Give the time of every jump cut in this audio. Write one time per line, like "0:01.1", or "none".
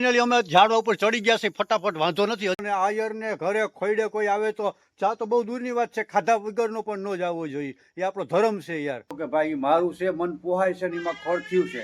0:02.6
0:09.1